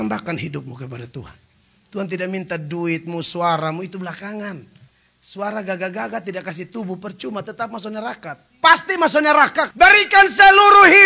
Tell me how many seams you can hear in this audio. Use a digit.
2